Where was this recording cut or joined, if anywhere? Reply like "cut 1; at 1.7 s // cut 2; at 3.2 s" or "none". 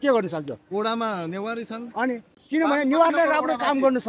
cut 1; at 2.3 s

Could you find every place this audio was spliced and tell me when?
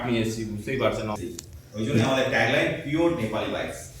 cut 1; at 1.2 s

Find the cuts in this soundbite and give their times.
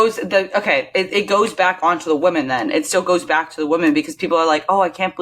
none

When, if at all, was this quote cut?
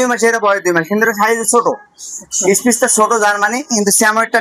none

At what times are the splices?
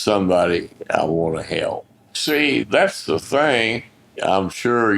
cut 1; at 2.2 s

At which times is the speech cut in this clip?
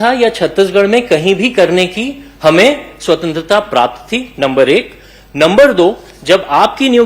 none

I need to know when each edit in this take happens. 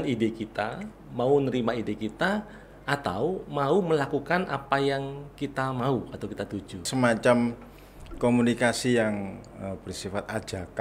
cut 1; at 6.9 s

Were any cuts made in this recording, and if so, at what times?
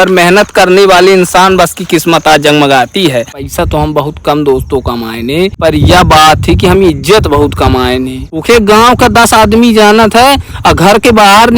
cut 1; at 3.4 s // cut 2; at 5.6 s // cut 3; at 8.3 s

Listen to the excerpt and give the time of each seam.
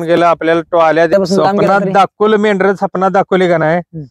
cut 1; at 1.1 s

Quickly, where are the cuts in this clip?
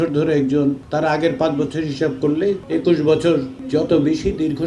cut 1; at 0.8 s // cut 2; at 2.6 s // cut 3; at 3.6 s

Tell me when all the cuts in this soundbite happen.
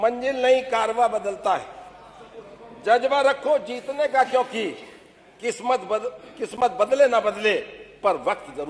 none

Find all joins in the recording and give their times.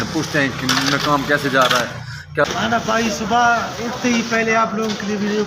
cut 1; at 2.5 s

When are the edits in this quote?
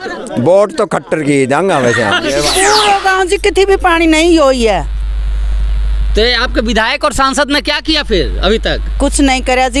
cut 1; at 2.5 s

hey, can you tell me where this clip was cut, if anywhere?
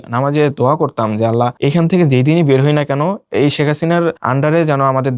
cut 1; at 1.5 s // cut 2; at 3.2 s // cut 3; at 4.2 s

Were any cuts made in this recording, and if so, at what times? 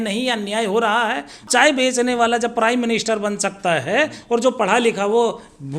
cut 1; at 1.5 s

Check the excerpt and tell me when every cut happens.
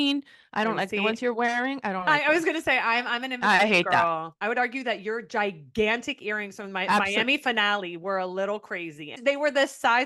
cut 1; at 4.3 s // cut 2; at 9.1 s

